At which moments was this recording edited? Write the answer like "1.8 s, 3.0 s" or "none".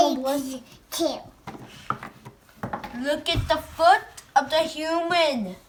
none